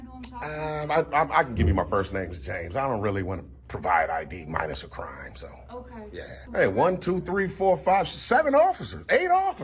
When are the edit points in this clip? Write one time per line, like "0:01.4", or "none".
0:06.4